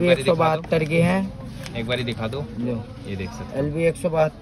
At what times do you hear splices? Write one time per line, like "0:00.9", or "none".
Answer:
none